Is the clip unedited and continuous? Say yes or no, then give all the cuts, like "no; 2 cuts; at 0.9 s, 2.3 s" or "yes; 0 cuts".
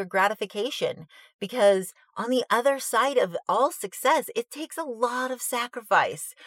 no; 1 cut; at 3.4 s